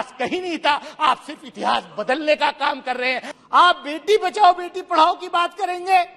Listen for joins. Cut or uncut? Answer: cut